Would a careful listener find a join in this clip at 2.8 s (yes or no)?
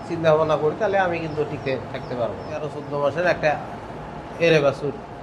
yes